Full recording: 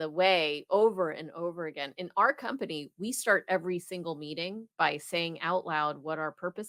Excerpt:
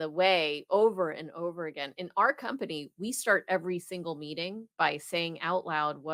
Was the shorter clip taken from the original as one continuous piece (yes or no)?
yes